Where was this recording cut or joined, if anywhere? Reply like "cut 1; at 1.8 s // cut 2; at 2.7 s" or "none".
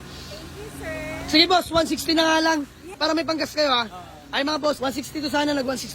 cut 1; at 3.0 s // cut 2; at 4.8 s